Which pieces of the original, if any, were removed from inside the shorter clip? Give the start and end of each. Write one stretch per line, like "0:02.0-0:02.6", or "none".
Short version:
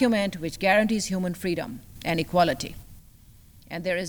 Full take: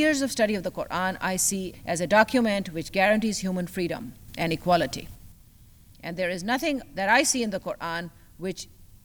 none